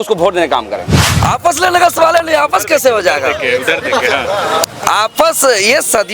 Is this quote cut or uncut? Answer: cut